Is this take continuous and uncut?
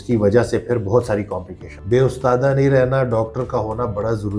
no; 1 cut; at 1.7 s

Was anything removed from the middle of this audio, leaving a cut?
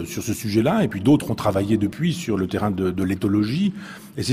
yes; 1 cut; at 3.4 s

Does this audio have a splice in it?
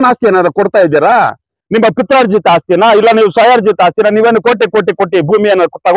no; 0 cuts

